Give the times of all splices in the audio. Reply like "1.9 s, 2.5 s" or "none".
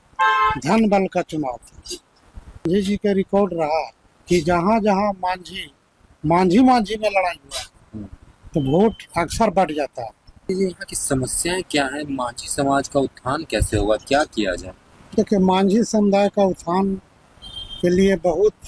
2.6 s, 10.5 s